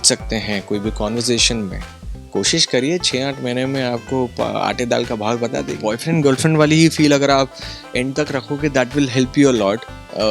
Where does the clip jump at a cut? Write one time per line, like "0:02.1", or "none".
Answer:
0:05.7